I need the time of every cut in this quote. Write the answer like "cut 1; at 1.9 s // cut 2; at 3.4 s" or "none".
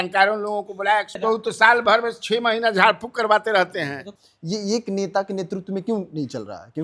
cut 1; at 1.2 s // cut 2; at 4.0 s